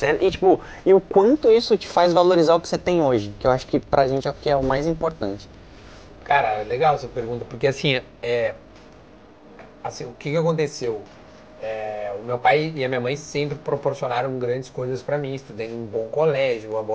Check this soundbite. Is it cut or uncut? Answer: uncut